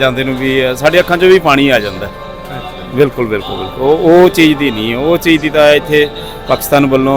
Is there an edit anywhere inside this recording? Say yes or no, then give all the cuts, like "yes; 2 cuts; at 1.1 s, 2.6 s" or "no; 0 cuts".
no; 0 cuts